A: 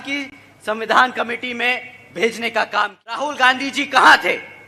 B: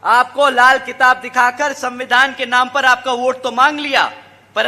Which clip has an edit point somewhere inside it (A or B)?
A